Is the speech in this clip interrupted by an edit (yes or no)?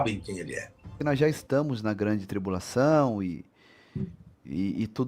yes